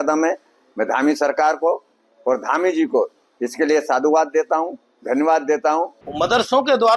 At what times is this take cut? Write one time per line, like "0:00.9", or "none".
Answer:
0:06.0